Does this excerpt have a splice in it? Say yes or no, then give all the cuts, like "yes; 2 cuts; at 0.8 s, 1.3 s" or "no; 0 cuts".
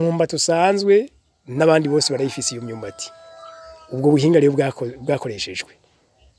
no; 0 cuts